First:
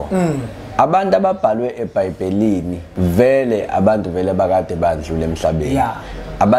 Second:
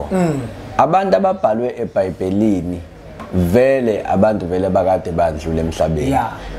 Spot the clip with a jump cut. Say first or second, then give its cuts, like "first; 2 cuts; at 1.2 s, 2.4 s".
first; 1 cut; at 2.8 s